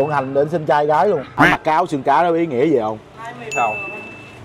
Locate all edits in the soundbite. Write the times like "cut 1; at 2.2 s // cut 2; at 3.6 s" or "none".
cut 1; at 1.3 s // cut 2; at 3.1 s